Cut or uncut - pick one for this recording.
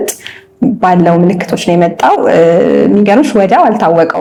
uncut